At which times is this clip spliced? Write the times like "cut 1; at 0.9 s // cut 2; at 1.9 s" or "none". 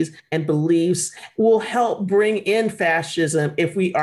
cut 1; at 1.2 s